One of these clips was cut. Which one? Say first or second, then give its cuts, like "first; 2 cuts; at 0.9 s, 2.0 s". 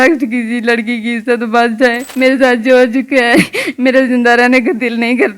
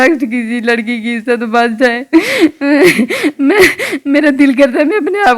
first; 1 cut; at 2.1 s